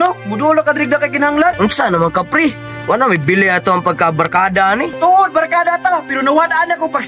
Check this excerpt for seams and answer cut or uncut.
cut